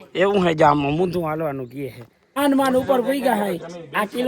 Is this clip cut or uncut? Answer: cut